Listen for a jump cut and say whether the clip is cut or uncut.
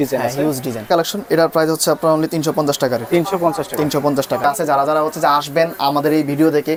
uncut